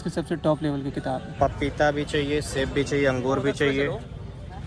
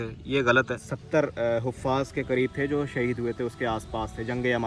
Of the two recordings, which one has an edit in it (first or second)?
first